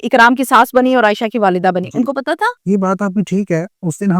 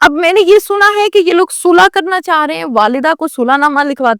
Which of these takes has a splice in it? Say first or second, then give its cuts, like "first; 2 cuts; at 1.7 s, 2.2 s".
first; 1 cut; at 2.6 s